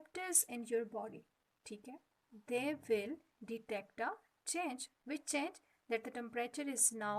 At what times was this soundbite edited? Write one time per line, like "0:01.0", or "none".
0:04.9